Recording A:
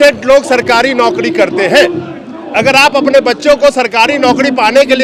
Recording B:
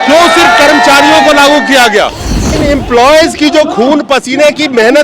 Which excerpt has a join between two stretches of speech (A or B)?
B